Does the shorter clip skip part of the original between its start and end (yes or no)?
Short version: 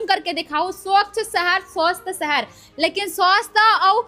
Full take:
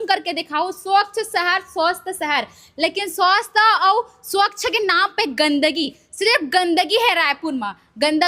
no